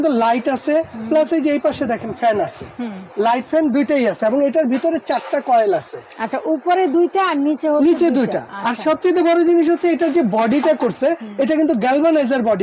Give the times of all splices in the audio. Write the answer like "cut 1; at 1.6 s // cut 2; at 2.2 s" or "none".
none